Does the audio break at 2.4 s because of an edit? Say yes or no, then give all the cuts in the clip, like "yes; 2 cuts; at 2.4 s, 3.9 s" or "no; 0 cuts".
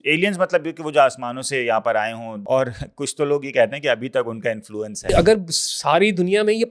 yes; 2 cuts; at 2.4 s, 5.1 s